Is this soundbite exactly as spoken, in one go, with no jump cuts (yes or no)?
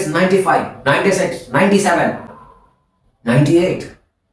yes